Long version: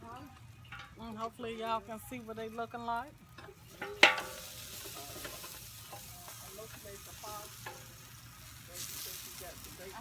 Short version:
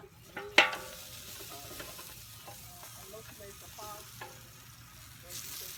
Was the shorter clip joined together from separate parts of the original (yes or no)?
no